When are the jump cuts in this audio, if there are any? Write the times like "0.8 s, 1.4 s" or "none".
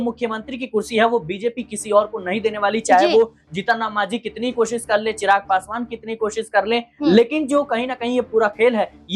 none